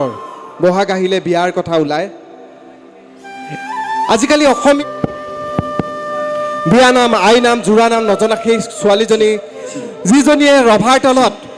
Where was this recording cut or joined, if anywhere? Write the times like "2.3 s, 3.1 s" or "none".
4.8 s